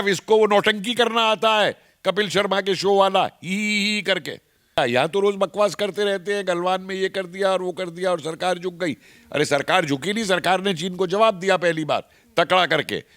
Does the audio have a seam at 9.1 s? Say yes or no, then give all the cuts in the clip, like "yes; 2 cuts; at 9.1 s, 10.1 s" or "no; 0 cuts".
no; 1 cut; at 4.8 s